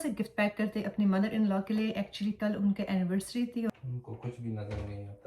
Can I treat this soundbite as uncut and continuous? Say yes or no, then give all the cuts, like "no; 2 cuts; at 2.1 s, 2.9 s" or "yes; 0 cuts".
no; 1 cut; at 3.7 s